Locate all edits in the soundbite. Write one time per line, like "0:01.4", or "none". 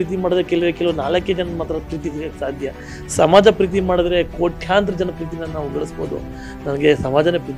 none